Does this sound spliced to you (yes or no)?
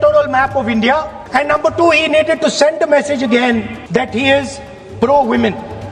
yes